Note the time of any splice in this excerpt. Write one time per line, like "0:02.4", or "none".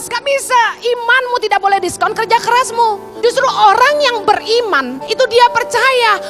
0:03.1
0:05.0